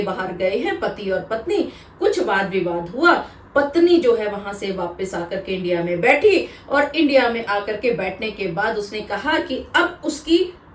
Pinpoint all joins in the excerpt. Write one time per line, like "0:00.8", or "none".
none